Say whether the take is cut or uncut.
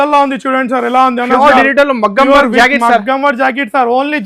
uncut